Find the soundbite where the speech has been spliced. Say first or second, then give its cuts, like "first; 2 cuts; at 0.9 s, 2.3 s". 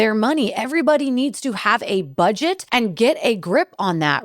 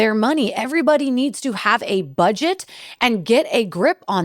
first; 1 cut; at 2.6 s